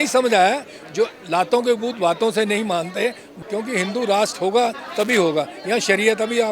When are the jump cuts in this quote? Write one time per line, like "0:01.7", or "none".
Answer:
0:03.2